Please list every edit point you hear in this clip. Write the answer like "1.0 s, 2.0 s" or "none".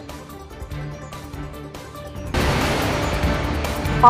none